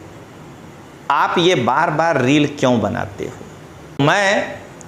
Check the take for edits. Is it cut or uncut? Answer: cut